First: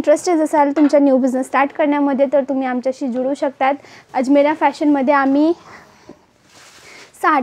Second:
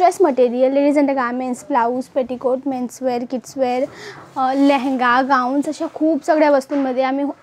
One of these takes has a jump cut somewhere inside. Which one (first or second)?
first